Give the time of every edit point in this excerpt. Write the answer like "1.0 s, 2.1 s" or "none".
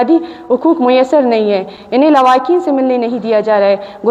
none